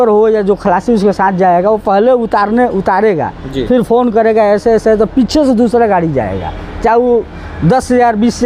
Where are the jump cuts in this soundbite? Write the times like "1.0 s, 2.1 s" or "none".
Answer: none